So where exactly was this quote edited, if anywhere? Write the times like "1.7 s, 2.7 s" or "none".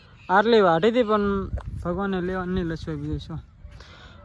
none

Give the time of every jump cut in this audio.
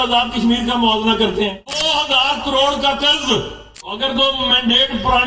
1.8 s, 4.0 s

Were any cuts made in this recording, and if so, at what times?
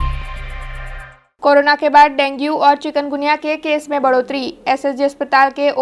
1.2 s

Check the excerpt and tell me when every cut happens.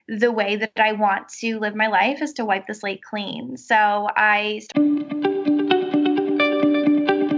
4.6 s

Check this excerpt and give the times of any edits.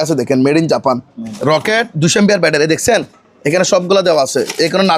1.3 s

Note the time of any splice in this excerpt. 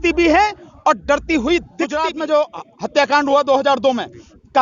1.9 s

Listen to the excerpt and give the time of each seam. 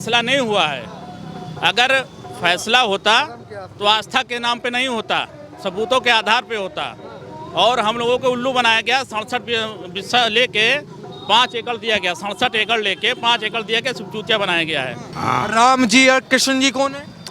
15.0 s

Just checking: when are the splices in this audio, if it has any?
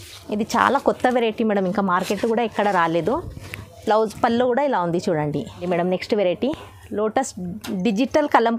5.5 s

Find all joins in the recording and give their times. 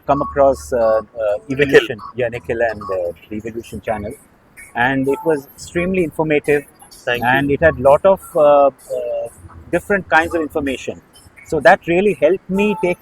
none

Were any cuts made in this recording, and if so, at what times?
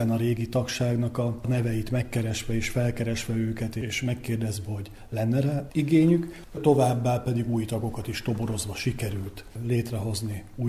3.8 s, 5.7 s, 6.6 s

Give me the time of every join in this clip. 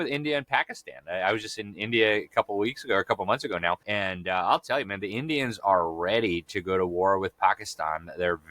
3.9 s

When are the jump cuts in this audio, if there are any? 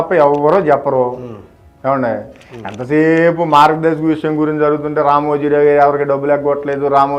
none

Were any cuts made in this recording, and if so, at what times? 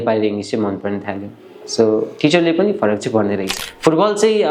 3.6 s

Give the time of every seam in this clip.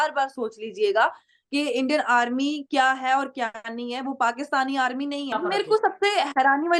5.3 s

